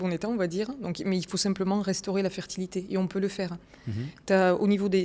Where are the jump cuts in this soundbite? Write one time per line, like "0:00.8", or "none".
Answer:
none